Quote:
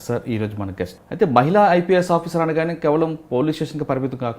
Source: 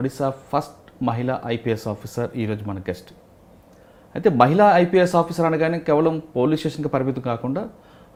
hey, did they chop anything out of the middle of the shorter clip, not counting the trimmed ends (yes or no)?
yes